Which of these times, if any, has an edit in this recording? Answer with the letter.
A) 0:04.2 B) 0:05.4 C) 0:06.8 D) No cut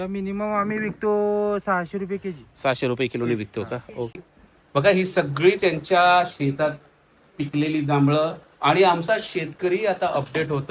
A